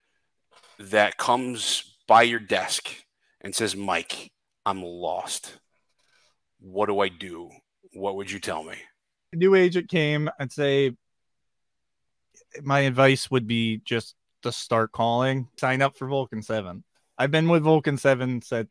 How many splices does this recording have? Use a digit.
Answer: 2